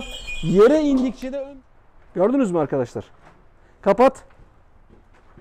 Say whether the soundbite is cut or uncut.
cut